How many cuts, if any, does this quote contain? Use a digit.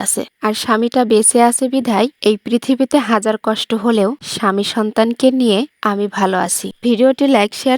1